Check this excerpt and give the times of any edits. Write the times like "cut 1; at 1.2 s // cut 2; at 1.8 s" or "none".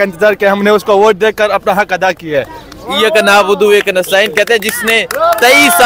none